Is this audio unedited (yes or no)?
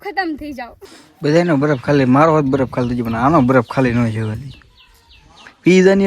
no